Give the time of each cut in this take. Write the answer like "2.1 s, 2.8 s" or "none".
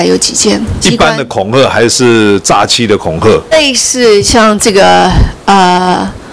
0.8 s, 3.5 s